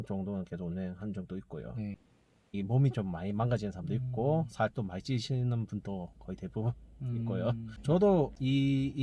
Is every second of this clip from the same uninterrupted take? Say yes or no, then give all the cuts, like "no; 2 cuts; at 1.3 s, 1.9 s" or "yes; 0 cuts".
no; 1 cut; at 2.1 s